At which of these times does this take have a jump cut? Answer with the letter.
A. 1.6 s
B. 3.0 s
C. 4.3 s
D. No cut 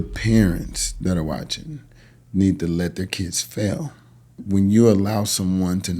C